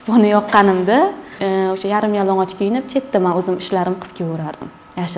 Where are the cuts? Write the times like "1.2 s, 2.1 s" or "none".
1.4 s